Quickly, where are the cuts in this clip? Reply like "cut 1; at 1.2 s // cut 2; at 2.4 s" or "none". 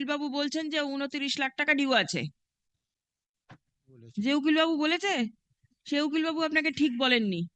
cut 1; at 4.0 s